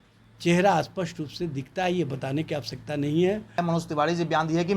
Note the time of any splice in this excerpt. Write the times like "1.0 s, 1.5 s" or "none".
3.6 s